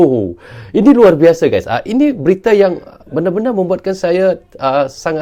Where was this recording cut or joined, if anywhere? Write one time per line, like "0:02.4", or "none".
none

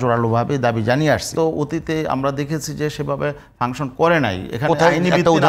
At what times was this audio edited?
0:01.3

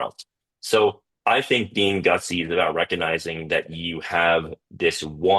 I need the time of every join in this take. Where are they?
0:01.1

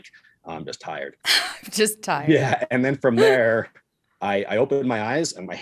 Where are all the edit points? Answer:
0:01.5

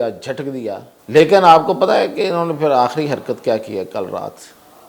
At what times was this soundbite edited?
0:00.9

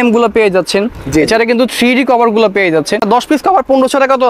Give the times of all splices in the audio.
0:03.0

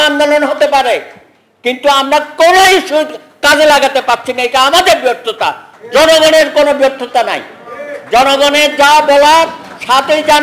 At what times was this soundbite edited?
none

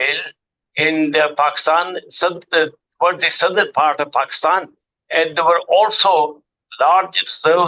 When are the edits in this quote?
none

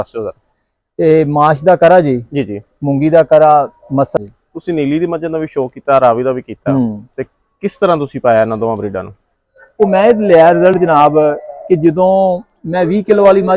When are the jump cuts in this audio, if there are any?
0:04.2
0:09.6

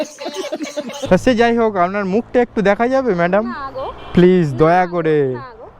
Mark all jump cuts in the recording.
0:01.0

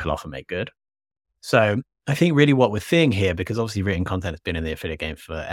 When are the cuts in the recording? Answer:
none

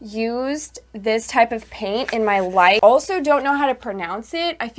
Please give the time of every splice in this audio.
0:02.8

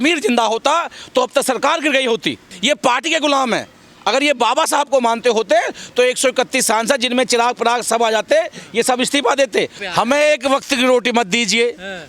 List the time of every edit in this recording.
0:02.5
0:09.8

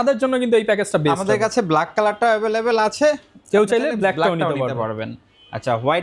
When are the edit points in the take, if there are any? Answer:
none

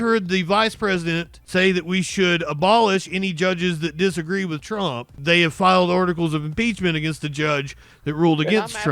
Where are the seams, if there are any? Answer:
0:01.3
0:05.1

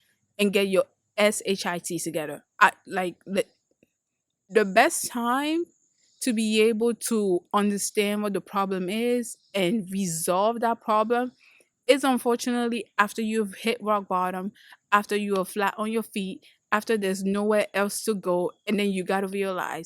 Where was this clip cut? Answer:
0:04.5

